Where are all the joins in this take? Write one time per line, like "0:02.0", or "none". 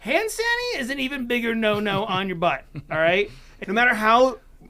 0:03.6